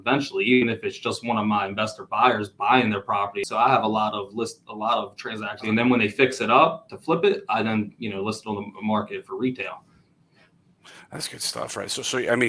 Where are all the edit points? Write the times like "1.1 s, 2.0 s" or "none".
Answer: 3.4 s, 5.6 s